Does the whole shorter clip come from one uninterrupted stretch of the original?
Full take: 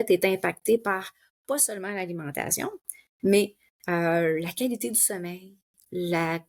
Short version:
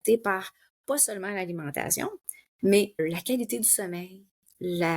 no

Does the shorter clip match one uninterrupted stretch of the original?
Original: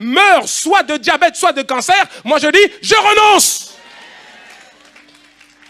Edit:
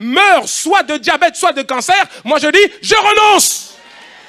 yes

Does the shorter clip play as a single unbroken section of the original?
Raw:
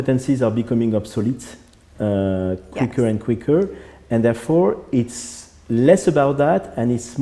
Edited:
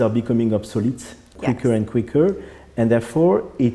no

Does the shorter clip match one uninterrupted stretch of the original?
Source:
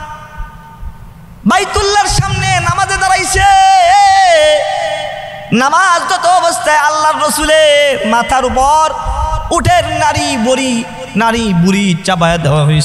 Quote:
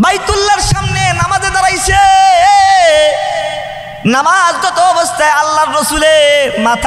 yes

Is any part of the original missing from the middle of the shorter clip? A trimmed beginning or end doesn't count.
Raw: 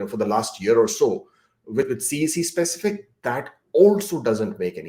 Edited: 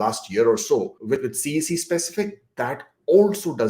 yes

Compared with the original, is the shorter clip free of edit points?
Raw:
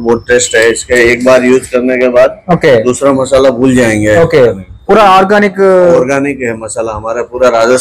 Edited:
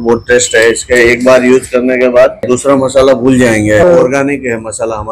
no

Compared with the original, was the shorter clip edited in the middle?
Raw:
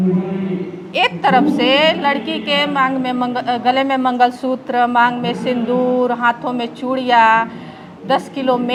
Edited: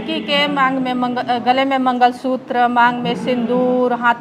no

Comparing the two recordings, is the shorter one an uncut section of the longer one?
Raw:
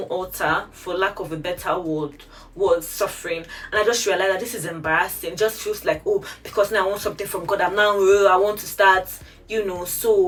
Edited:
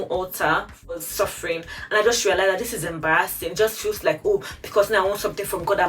no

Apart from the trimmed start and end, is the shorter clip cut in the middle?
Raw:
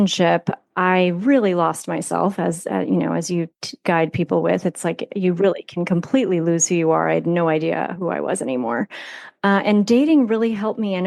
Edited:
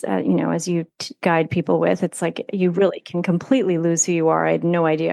no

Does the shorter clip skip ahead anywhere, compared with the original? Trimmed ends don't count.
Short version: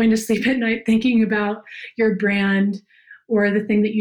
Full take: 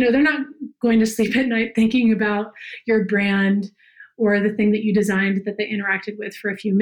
no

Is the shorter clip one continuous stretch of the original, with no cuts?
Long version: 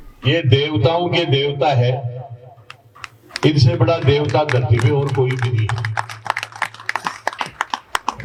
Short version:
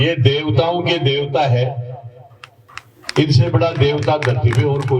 yes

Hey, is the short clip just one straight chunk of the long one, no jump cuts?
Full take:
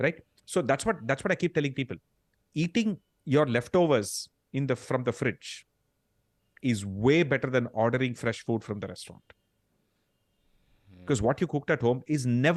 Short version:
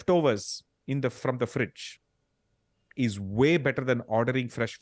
yes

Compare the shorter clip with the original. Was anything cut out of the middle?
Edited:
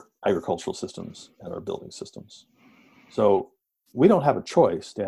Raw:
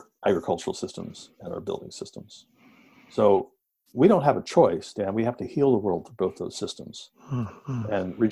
no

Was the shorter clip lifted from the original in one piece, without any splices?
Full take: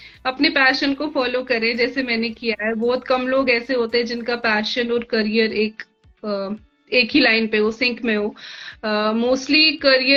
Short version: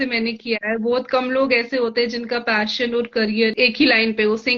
no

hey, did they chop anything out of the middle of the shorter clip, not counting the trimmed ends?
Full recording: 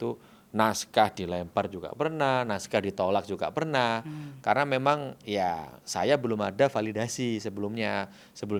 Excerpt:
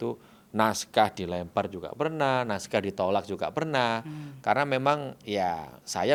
no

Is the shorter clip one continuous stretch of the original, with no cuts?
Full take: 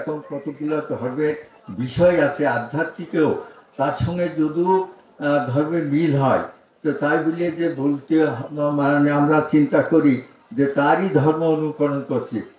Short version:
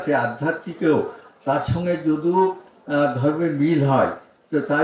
yes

